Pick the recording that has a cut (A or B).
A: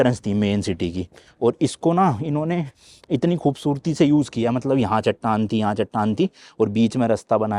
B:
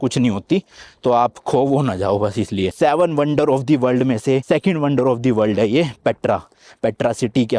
B